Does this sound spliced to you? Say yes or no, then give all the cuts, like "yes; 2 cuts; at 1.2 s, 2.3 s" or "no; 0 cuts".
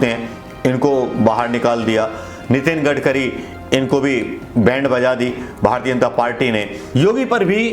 yes; 1 cut; at 6.8 s